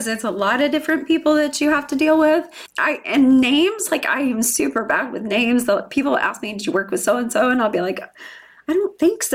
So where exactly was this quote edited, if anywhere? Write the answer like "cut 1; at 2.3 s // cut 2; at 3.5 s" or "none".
cut 1; at 2.7 s